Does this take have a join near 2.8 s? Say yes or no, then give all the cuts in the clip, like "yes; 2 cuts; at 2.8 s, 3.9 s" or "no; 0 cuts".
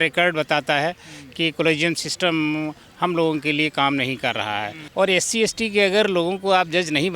no; 1 cut; at 4.8 s